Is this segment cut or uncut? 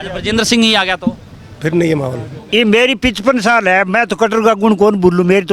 cut